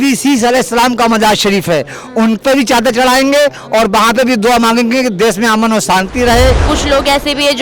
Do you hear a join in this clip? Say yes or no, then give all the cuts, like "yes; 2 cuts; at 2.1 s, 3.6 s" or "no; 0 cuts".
yes; 1 cut; at 6.7 s